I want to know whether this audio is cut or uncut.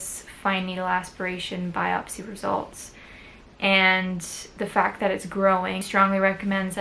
cut